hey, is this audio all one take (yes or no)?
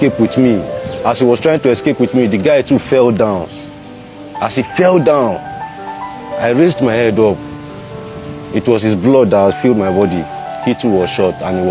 yes